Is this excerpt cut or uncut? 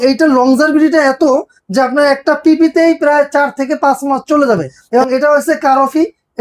cut